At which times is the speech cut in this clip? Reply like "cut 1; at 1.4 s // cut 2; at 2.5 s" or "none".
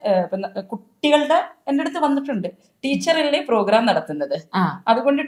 none